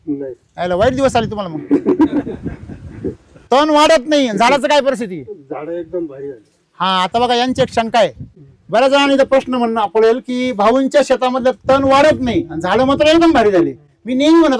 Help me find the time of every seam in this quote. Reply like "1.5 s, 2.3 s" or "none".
none